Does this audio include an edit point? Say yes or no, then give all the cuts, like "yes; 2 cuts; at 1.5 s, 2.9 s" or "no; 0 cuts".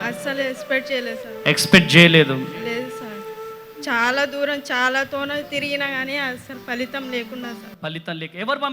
no; 0 cuts